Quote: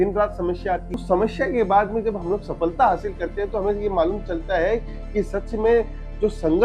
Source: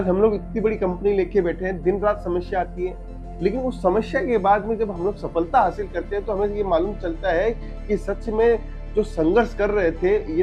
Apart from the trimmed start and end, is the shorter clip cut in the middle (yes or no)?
yes